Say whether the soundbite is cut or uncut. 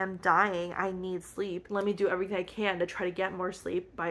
uncut